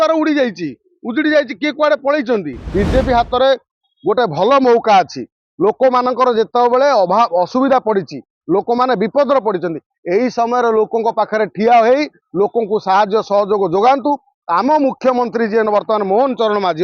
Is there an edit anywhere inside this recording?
yes; 1 cut; at 2.6 s

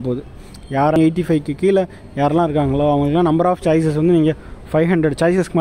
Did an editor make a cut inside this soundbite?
yes; 1 cut; at 1.0 s

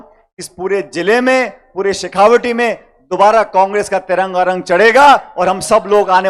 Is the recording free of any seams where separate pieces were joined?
yes; 0 cuts

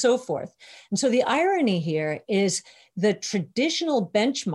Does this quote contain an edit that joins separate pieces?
no; 0 cuts

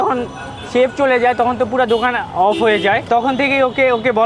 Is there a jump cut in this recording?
yes; 1 cut; at 3.0 s

